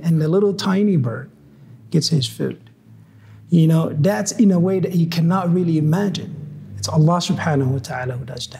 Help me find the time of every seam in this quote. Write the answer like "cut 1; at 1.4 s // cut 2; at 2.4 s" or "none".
none